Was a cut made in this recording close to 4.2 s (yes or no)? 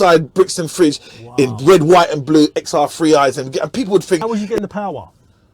yes